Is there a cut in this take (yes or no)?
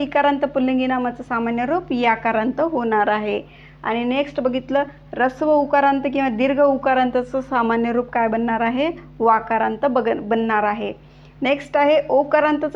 no